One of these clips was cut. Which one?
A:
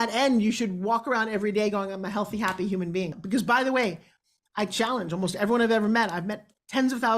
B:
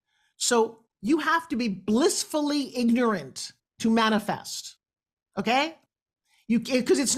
A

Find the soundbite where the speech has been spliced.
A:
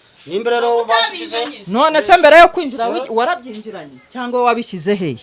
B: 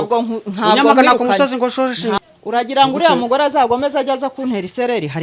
B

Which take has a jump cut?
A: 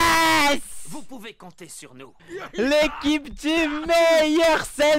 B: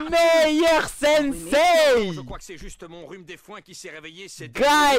A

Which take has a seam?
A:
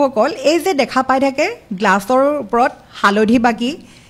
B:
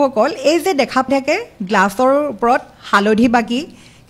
B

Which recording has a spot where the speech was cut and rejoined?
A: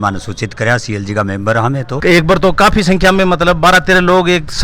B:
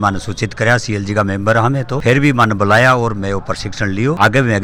A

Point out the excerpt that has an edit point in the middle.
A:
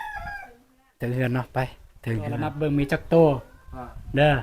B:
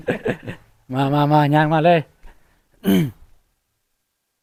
A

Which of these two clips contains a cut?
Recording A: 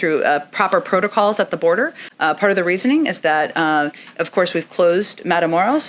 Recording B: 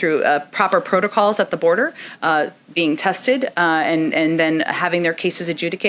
A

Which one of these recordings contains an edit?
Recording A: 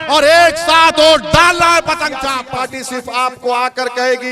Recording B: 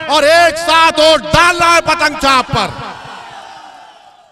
A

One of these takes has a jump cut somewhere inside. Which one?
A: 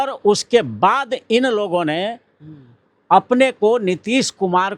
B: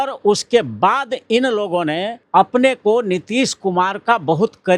B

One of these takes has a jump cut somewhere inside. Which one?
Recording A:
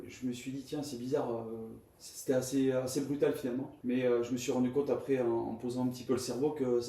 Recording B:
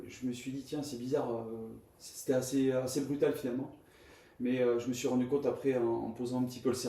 A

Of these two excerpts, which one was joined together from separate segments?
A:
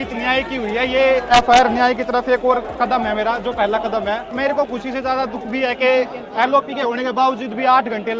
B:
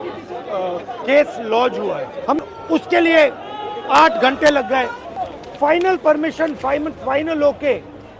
B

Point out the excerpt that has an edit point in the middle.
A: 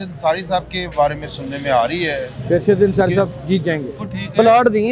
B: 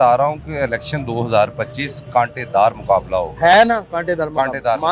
A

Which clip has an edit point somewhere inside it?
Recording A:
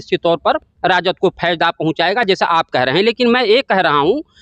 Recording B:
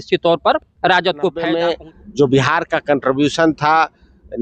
B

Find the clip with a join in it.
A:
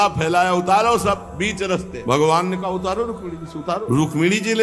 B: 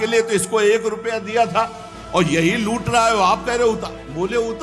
A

